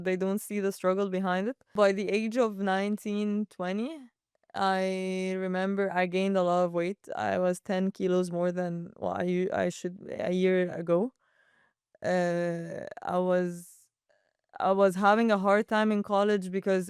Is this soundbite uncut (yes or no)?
no